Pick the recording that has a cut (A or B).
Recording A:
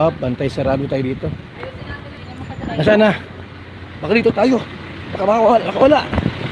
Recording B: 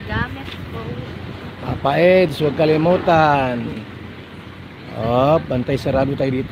A